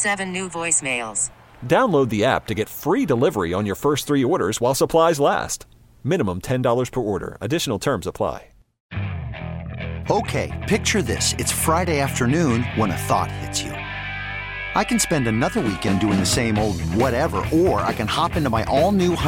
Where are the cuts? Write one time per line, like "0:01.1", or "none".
0:08.8